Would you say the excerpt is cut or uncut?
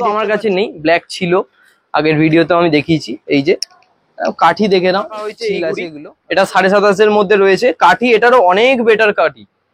cut